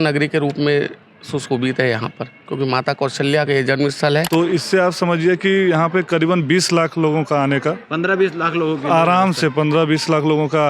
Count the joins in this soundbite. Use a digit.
1